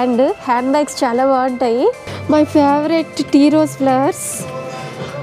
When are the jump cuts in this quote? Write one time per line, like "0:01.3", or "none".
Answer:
0:02.1